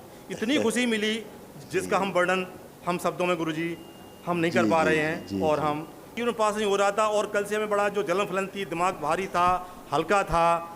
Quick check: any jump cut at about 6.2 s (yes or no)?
yes